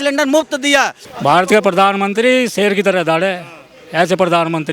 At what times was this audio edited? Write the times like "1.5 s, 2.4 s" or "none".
1.0 s

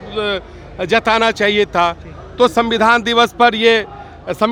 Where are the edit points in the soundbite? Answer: none

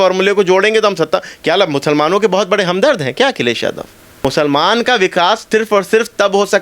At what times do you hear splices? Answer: 4.2 s

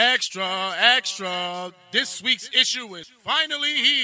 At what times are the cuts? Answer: 3.1 s

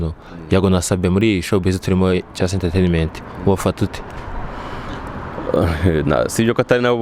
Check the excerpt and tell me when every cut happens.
none

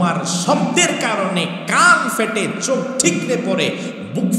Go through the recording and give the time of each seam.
none

